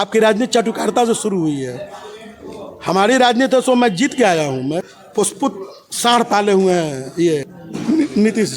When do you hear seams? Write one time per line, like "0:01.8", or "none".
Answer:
0:04.9